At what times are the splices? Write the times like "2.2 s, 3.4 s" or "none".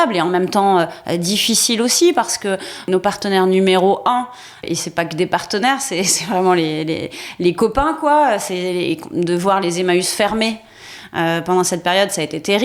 2.8 s, 4.6 s